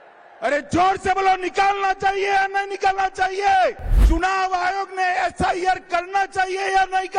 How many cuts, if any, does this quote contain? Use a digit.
1